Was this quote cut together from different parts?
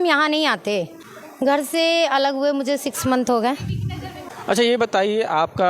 yes; 2 cuts; at 1.0 s, 4.3 s

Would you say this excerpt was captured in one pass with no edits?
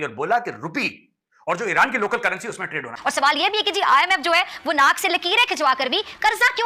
no; 1 cut; at 2.9 s

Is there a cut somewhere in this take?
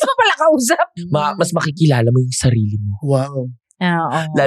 yes; 1 cut; at 0.9 s

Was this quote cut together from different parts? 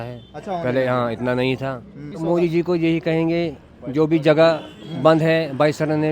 yes; 1 cut; at 2.1 s

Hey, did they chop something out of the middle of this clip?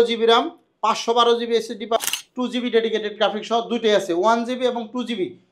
yes; 1 cut; at 2.0 s

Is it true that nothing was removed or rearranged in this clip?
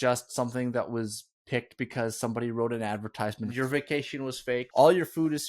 no; 2 cuts; at 3.5 s, 4.7 s

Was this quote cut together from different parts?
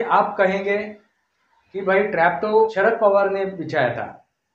yes; 1 cut; at 2.7 s

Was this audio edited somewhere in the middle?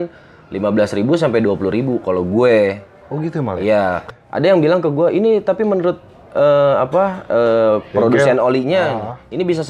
yes; 1 cut; at 4.0 s

